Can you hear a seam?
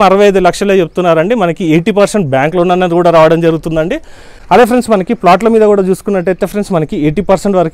no; 0 cuts

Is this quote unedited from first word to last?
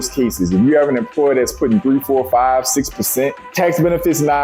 no; 1 cut; at 3.4 s

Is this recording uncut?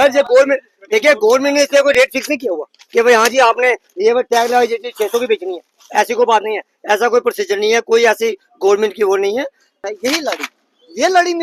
no; 1 cut; at 9.8 s

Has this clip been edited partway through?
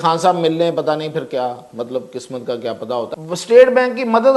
yes; 1 cut; at 3.1 s

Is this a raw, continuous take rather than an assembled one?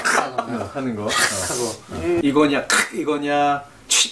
no; 1 cut; at 2.2 s

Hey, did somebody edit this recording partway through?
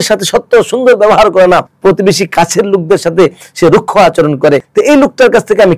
yes; 2 cuts; at 1.7 s, 4.7 s

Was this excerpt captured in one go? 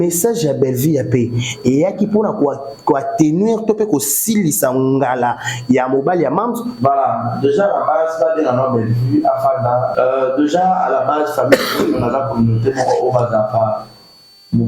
no; 2 cuts; at 6.7 s, 9.9 s

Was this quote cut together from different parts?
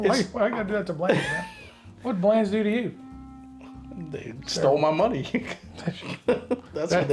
no; 0 cuts

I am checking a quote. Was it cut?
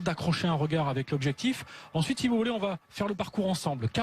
yes; 1 cut; at 1.7 s

